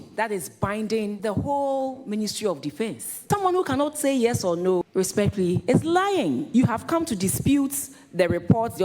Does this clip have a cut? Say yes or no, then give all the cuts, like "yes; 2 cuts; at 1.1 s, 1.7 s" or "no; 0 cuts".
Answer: yes; 4 cuts; at 1.2 s, 3.1 s, 4.9 s, 6.5 s